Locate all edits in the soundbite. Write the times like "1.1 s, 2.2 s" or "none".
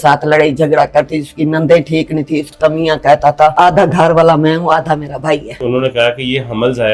2.5 s, 3.5 s, 5.6 s